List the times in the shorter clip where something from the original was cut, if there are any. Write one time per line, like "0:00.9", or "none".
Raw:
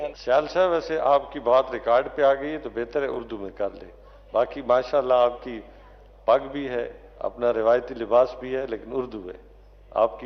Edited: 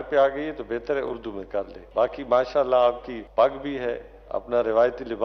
0:01.8
0:03.1